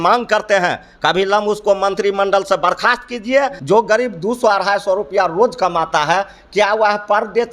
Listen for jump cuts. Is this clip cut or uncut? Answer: cut